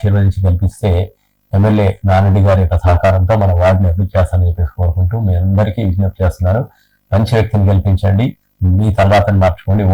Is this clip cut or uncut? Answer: uncut